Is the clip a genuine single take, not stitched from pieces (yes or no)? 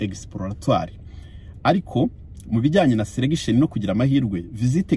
yes